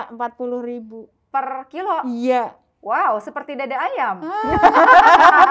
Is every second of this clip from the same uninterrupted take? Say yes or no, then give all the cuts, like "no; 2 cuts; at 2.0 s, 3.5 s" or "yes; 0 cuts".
yes; 0 cuts